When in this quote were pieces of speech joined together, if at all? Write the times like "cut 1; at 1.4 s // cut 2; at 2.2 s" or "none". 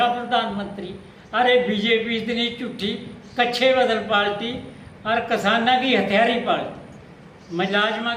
none